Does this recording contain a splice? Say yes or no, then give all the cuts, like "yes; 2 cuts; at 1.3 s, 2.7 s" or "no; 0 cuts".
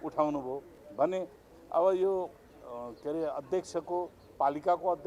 no; 0 cuts